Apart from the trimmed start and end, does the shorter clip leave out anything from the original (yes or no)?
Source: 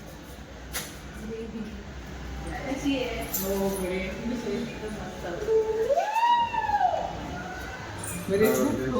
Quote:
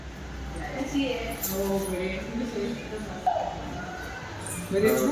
yes